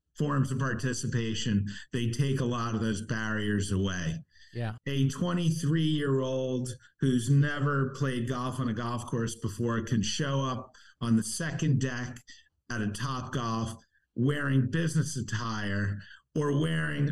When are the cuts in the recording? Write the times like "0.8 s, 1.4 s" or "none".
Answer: 4.7 s

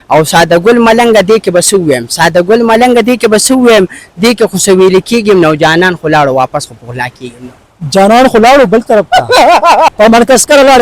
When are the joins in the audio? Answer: 9.9 s

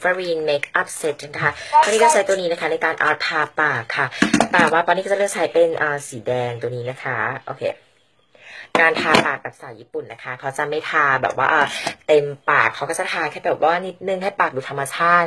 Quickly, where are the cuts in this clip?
none

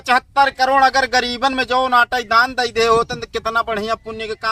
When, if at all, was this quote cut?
none

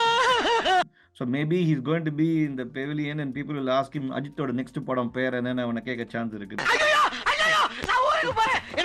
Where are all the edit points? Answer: none

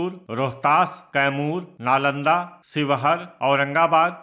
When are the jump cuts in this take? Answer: 1.7 s

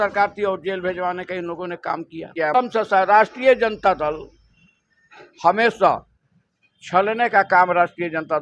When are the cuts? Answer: 2.5 s

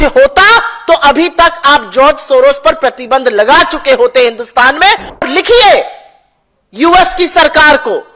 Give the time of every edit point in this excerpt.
5.2 s

